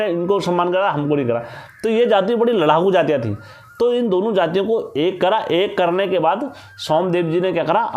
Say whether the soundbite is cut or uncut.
uncut